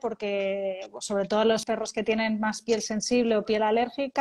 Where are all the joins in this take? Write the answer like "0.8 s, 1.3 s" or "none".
1.6 s